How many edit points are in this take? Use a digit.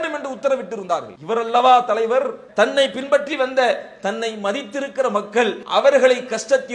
3